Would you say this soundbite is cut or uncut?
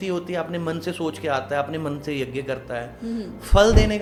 uncut